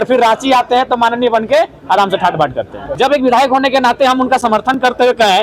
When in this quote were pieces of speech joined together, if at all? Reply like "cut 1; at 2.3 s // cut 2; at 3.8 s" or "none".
cut 1; at 2.8 s